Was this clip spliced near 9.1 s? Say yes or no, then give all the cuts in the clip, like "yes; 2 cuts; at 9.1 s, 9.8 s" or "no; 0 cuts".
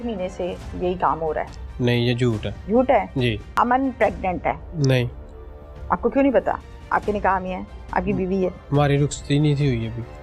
no; 3 cuts; at 2.5 s, 3.5 s, 4.7 s